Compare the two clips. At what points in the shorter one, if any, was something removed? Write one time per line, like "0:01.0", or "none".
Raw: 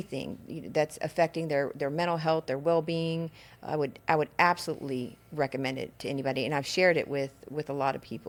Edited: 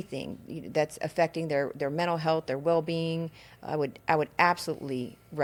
none